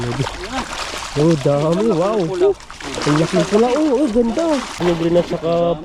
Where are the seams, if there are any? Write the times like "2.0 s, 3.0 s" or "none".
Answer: 4.8 s